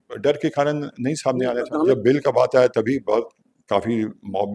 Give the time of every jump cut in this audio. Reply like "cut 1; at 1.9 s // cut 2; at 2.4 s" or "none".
cut 1; at 1.9 s